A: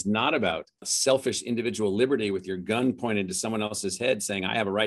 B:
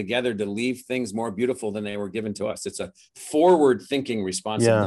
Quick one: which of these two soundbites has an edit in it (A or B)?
A